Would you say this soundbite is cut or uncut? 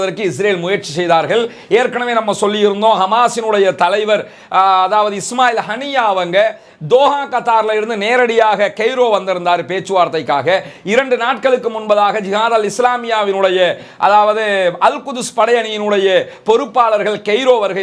uncut